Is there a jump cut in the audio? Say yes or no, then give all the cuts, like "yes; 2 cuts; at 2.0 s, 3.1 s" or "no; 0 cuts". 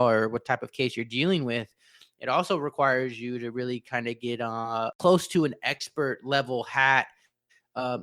yes; 1 cut; at 5.0 s